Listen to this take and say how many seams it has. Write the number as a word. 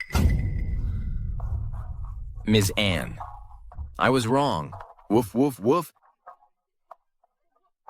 zero